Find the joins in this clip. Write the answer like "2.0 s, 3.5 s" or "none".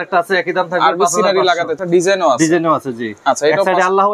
1.7 s

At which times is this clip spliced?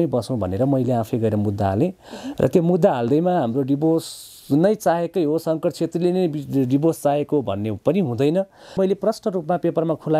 8.8 s

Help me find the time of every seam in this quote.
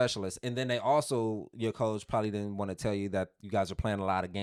none

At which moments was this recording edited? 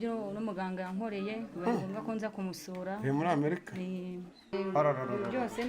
4.5 s

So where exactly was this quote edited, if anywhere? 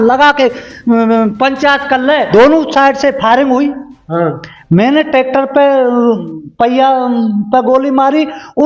2.3 s

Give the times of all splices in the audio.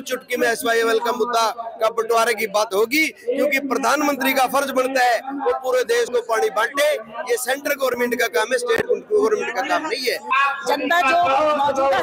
10.3 s

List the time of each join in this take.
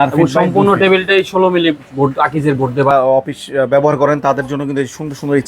2.9 s

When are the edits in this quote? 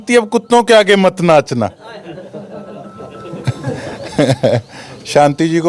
none

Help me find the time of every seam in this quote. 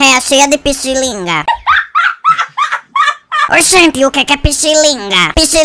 1.5 s, 3.2 s

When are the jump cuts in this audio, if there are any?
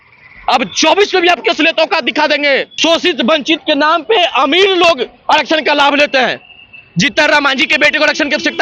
2.7 s

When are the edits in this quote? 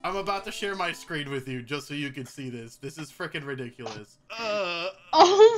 4.2 s

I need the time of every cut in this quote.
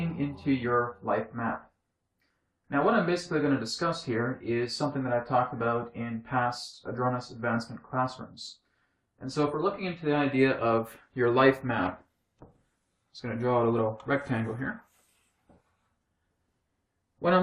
none

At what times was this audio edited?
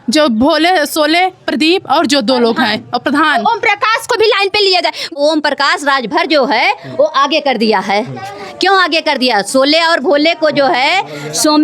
5.0 s

